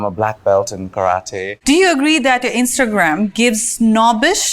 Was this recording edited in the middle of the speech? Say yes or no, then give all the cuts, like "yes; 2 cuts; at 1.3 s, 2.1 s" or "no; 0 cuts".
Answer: yes; 1 cut; at 1.6 s